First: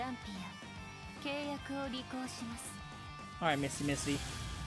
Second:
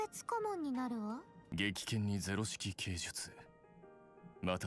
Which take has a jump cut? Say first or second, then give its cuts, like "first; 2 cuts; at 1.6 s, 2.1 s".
second; 1 cut; at 1.4 s